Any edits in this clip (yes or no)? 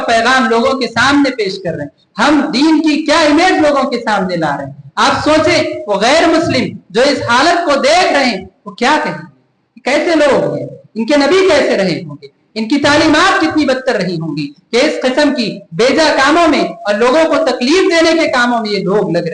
no